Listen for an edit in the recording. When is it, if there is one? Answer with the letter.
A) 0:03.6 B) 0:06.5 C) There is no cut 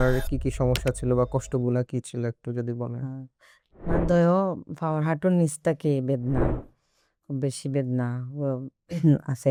C